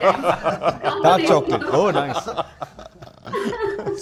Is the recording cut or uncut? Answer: uncut